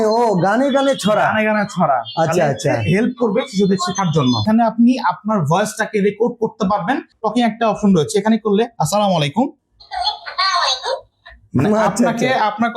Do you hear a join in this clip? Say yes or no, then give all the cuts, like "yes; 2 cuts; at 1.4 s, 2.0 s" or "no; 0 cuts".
yes; 2 cuts; at 4.4 s, 7.1 s